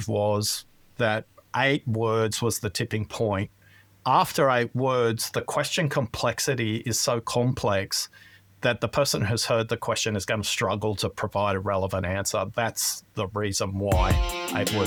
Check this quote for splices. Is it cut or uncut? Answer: uncut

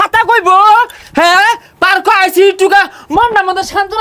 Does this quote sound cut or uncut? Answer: uncut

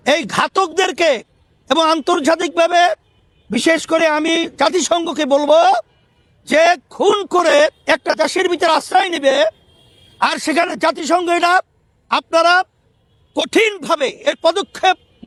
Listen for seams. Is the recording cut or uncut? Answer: uncut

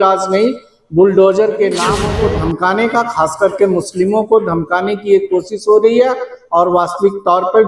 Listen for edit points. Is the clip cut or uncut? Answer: cut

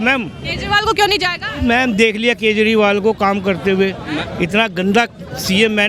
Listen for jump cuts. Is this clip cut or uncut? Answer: uncut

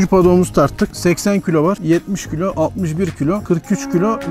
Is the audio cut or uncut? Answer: cut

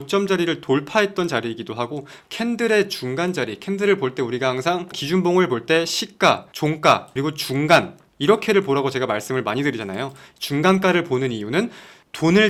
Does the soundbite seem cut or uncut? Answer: uncut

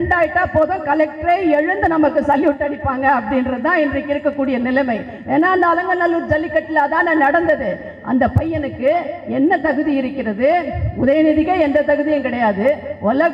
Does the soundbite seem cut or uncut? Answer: uncut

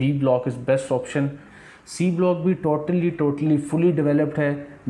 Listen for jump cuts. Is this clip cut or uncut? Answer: cut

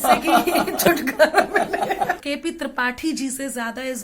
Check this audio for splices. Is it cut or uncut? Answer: cut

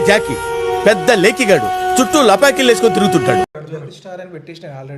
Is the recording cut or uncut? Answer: cut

